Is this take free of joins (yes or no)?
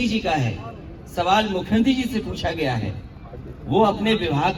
yes